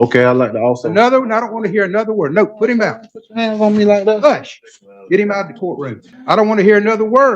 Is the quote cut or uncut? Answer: cut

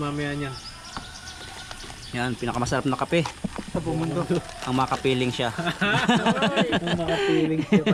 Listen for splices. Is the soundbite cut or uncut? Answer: uncut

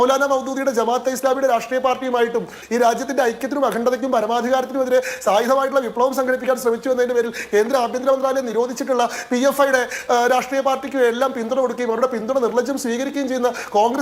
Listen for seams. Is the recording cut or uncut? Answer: uncut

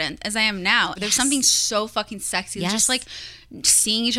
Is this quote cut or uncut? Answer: cut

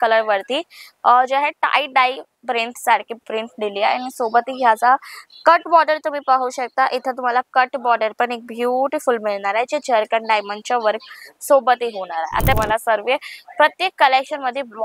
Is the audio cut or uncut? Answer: cut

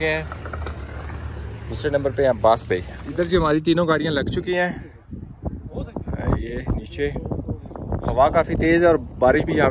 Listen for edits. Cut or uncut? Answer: cut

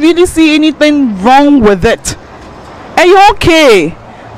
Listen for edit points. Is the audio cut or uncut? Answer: uncut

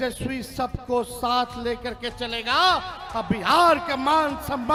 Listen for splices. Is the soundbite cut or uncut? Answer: uncut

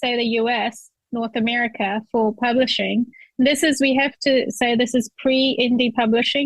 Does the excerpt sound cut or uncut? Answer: uncut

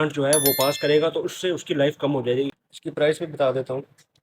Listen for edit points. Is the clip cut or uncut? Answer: cut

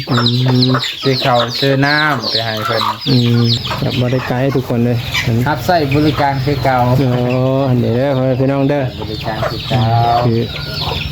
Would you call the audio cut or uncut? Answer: cut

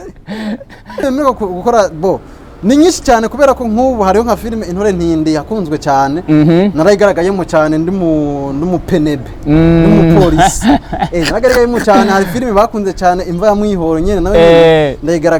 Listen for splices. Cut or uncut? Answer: cut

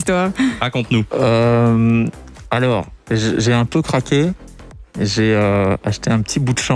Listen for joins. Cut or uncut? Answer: uncut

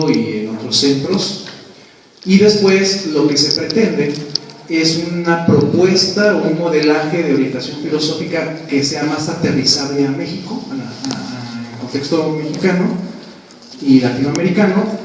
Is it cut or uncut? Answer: uncut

